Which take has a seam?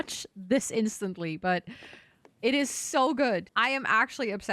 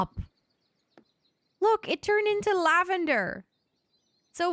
first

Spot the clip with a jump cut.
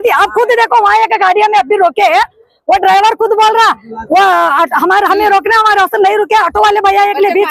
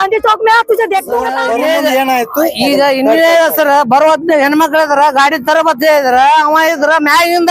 second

